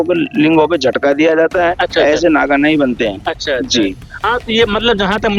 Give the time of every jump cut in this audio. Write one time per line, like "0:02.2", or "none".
none